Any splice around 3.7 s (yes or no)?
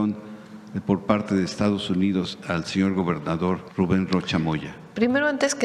yes